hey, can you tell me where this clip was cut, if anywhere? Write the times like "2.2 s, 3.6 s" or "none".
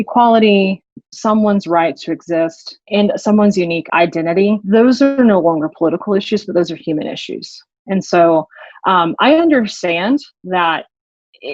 1.0 s, 2.9 s, 4.0 s